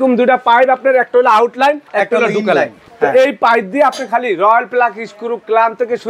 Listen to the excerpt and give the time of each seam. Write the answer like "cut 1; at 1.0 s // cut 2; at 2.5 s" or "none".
cut 1; at 1.8 s // cut 2; at 2.8 s